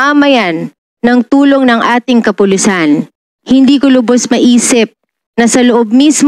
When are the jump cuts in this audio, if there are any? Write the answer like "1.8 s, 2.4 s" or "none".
none